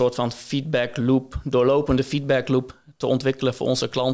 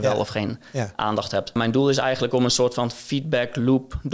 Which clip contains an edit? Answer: second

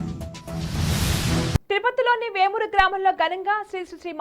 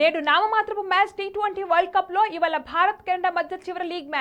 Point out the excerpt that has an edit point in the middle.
first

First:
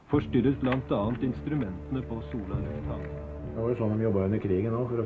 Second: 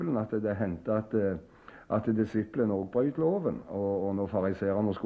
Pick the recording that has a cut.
first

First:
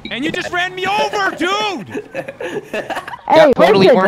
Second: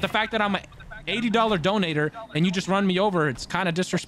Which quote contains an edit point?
first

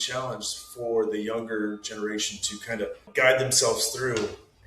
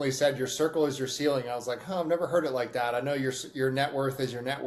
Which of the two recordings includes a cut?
first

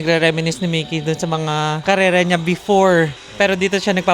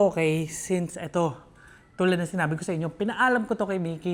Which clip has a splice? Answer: first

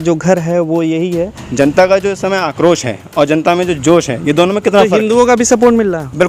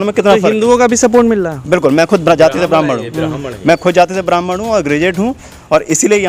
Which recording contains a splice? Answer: first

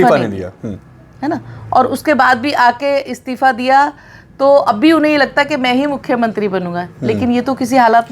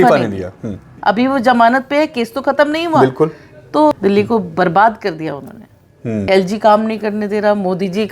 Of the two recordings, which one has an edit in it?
second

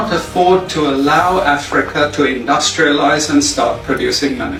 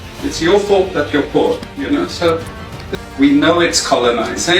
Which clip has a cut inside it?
second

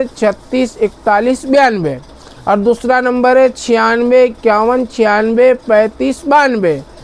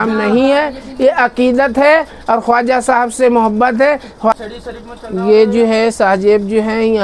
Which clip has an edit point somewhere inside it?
second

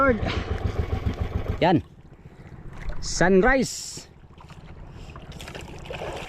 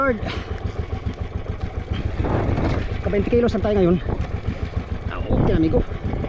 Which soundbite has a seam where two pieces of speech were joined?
first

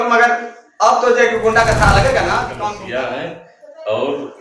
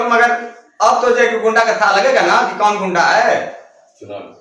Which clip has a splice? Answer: first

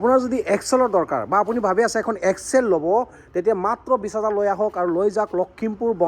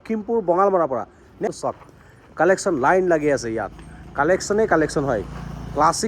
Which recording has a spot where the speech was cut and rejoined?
second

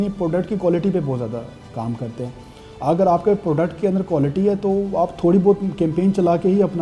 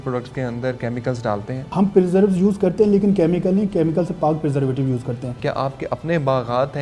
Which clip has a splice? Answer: second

